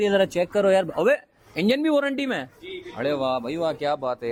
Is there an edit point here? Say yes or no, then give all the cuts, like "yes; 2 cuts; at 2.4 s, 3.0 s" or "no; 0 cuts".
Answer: no; 0 cuts